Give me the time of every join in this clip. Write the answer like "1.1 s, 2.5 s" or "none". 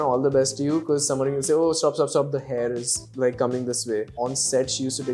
4.1 s

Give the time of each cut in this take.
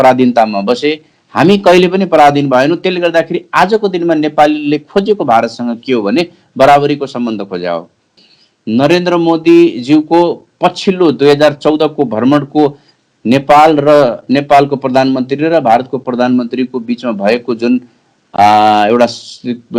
8.1 s

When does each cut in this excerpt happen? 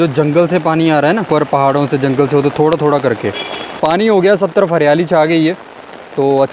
1.3 s, 3.8 s

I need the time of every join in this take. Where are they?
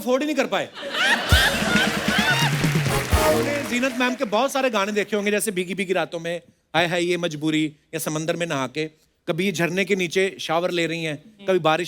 3.6 s

